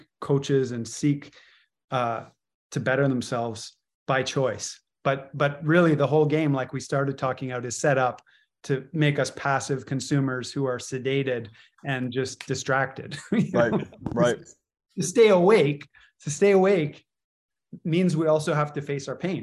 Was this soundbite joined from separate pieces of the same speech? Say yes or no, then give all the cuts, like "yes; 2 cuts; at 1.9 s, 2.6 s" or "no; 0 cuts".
no; 0 cuts